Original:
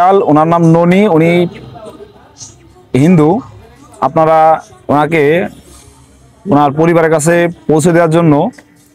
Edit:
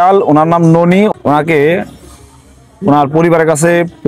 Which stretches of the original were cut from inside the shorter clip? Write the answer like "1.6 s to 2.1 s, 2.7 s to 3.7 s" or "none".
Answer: 1.1 s to 4.7 s